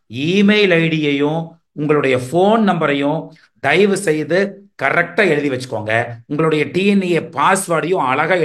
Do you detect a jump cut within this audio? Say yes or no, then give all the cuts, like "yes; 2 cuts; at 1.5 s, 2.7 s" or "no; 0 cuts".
no; 0 cuts